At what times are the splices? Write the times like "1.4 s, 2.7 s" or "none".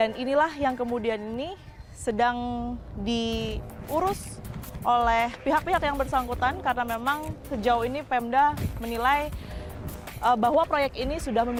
none